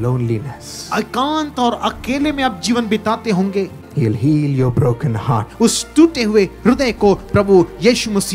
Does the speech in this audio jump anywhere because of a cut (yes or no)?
yes